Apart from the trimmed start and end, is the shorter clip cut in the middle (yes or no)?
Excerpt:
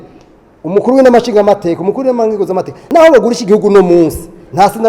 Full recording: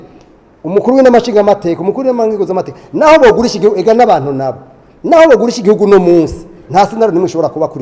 yes